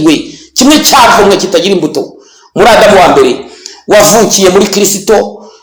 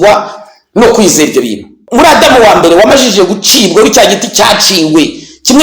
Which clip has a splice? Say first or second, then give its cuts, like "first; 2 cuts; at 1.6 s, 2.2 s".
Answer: second; 1 cut; at 1.8 s